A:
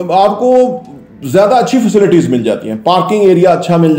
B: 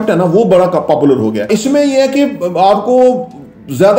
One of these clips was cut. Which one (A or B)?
B